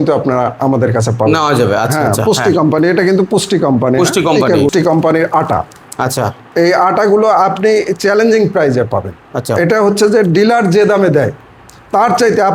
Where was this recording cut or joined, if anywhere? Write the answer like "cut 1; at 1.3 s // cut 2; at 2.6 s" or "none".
cut 1; at 4.7 s